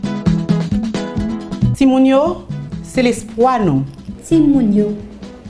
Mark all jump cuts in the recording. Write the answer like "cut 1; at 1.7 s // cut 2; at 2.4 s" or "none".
cut 1; at 1.7 s